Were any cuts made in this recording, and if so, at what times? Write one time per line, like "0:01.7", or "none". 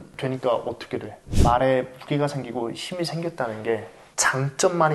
0:01.2